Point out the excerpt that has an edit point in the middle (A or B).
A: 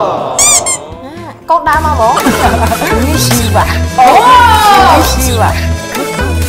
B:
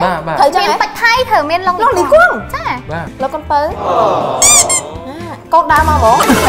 B